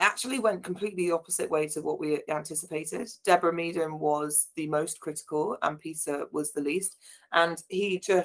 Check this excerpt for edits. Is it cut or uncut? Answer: uncut